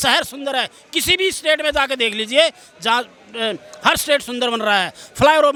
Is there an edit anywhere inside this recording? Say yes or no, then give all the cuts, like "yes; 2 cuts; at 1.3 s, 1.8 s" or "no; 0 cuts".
no; 0 cuts